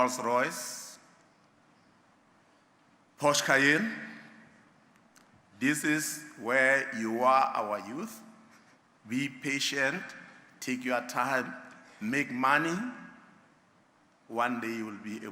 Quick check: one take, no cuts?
yes; 0 cuts

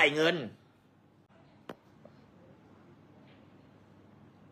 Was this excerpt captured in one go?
no; 1 cut; at 1.3 s

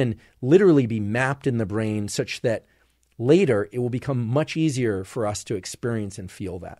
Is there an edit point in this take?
no; 0 cuts

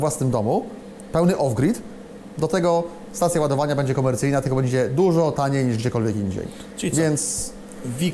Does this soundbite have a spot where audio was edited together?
no; 0 cuts

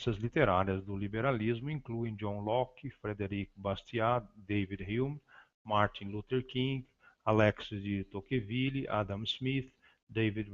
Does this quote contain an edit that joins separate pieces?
yes; 1 cut; at 9.3 s

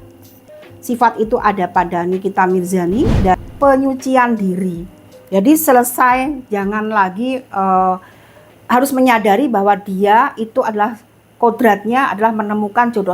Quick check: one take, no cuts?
no; 1 cut; at 3.4 s

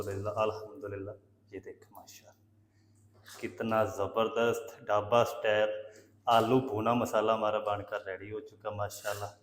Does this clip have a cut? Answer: no; 0 cuts

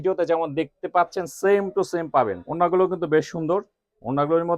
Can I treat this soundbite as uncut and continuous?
no; 1 cut; at 2.4 s

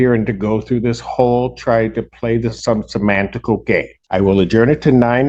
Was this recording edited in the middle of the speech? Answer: yes; 1 cut; at 4.0 s

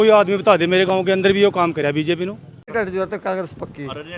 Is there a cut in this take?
yes; 1 cut; at 2.7 s

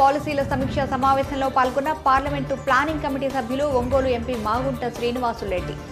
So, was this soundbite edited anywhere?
no; 0 cuts

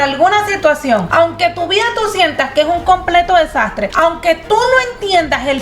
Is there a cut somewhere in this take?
yes; 2 cuts; at 1.1 s, 3.8 s

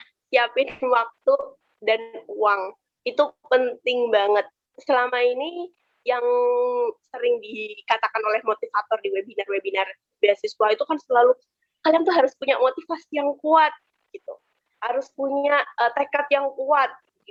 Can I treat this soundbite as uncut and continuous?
yes; 0 cuts

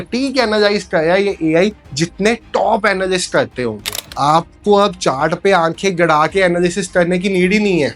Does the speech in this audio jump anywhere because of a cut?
yes; 1 cut; at 4.1 s

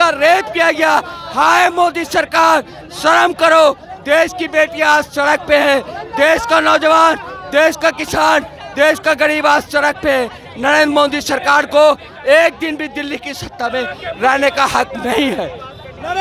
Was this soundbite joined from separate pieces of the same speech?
no; 0 cuts

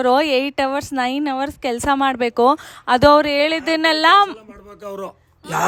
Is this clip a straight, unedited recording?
yes; 0 cuts

